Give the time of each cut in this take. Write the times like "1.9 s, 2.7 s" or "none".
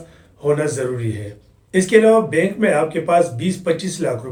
none